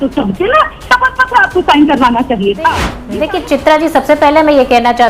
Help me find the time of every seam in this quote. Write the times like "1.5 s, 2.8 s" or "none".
3.2 s